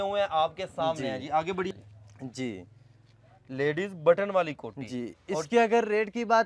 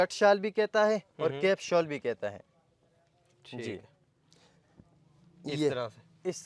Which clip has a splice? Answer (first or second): first